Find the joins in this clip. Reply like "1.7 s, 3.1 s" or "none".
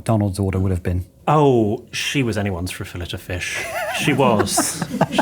1.1 s